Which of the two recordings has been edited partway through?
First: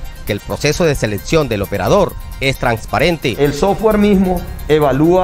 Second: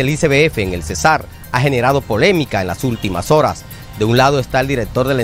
first; 1 cut; at 3.3 s

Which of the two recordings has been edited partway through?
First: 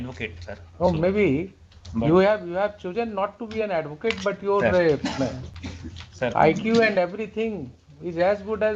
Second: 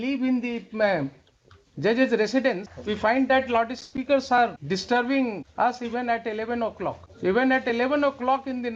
second; 4 cuts; at 2.7 s, 4.6 s, 5.5 s, 7.1 s

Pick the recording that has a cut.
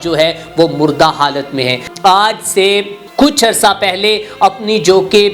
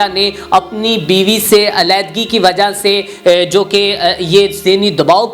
first; 2 cuts; at 1.8 s, 3.0 s

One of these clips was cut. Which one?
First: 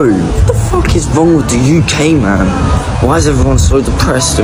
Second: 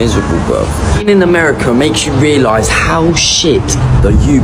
second; 1 cut; at 0.9 s

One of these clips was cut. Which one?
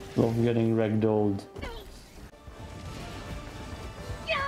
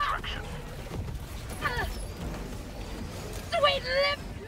first; 1 cut; at 2.3 s

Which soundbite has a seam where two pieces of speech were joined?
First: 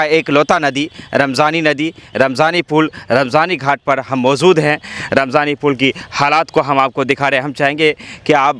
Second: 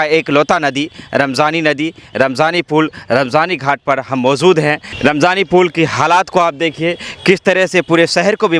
second; 1 cut; at 4.9 s

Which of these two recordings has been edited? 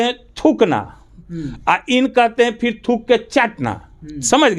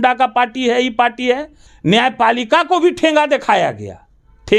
second; 1 cut; at 1.6 s

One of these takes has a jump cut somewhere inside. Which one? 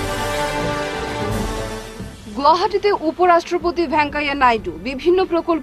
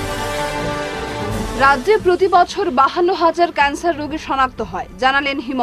second; 1 cut; at 1.1 s

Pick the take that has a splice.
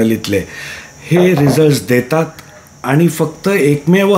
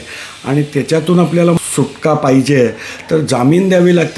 second; 1 cut; at 1.6 s

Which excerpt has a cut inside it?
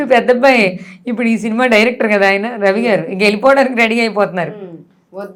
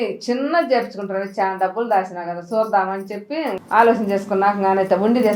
second; 1 cut; at 3.6 s

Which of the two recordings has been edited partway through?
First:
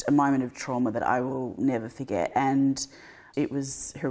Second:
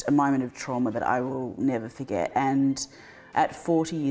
second; 1 cut; at 3.2 s

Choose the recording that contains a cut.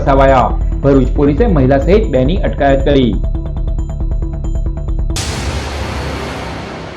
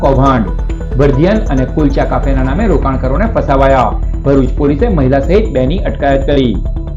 first; 1 cut; at 5.0 s

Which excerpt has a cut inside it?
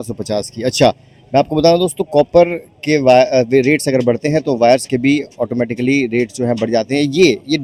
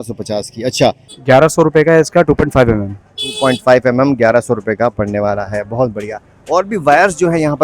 second; 1 cut; at 1.1 s

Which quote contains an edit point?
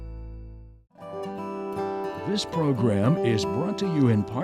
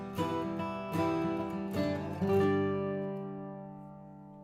first; 2 cuts; at 1.1 s, 2.3 s

